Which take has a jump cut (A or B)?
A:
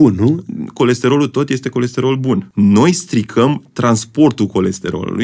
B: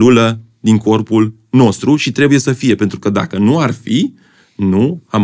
A